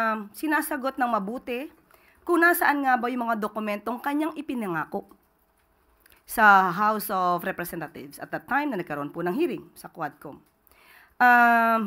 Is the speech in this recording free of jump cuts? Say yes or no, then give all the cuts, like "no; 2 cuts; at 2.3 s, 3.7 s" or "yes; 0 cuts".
yes; 0 cuts